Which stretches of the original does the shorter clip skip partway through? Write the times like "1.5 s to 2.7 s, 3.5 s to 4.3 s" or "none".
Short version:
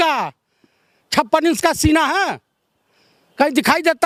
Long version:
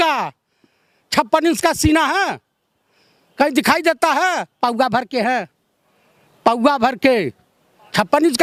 none